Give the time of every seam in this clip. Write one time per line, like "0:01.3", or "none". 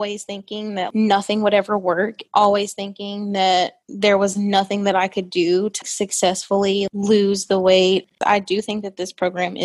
0:08.1